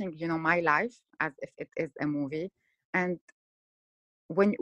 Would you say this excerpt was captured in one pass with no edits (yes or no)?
yes